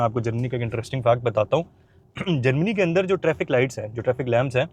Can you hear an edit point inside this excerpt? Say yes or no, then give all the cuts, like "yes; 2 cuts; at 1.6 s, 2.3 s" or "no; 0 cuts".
no; 0 cuts